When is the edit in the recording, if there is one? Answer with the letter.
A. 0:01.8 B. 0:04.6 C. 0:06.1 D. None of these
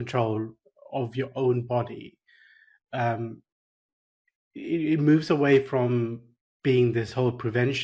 D